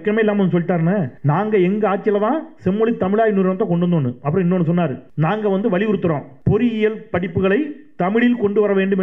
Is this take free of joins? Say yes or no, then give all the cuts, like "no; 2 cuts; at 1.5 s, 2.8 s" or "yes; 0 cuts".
no; 3 cuts; at 1.1 s, 5.0 s, 6.3 s